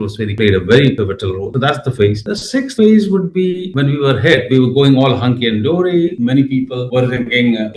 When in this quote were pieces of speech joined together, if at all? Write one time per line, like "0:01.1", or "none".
none